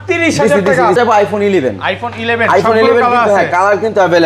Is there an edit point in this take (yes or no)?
yes